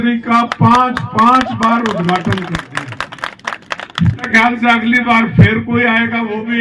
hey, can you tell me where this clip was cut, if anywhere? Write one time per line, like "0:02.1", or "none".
0:04.3